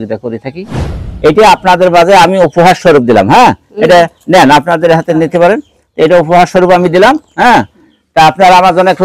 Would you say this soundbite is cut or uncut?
cut